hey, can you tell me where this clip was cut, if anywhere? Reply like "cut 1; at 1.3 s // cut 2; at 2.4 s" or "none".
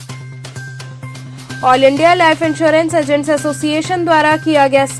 none